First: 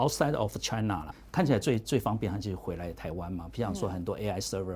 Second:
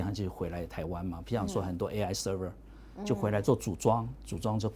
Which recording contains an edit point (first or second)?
first